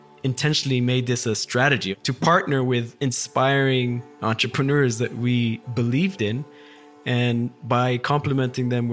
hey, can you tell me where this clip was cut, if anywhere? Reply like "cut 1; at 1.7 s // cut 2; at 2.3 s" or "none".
cut 1; at 1.9 s